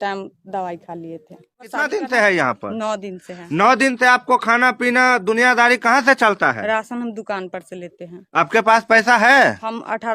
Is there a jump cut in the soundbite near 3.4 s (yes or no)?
no